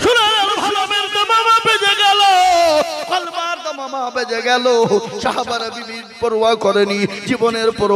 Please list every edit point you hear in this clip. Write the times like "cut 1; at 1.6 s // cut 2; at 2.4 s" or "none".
cut 1; at 0.9 s